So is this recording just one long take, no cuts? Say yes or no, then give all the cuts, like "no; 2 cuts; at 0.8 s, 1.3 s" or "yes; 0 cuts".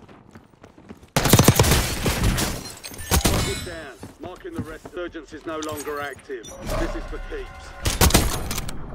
no; 1 cut; at 4.9 s